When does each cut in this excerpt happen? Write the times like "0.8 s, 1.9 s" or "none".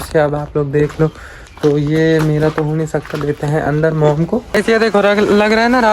4.5 s